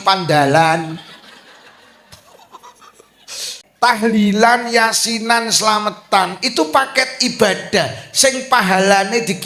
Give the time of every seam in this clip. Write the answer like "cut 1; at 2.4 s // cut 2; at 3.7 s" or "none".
cut 1; at 3.8 s